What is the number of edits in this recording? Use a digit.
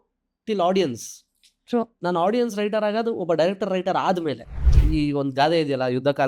1